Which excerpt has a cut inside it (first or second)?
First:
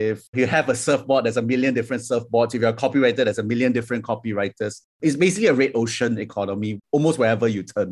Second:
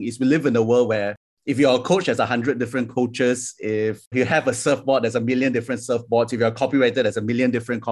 first